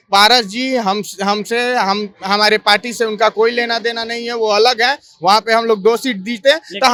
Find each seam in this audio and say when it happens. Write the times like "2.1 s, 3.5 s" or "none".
none